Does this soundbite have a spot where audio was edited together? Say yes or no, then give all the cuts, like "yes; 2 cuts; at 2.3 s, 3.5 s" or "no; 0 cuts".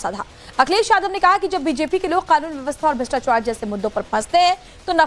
yes; 1 cut; at 4.0 s